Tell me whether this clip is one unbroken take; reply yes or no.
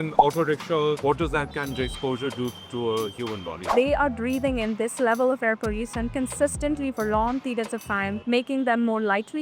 no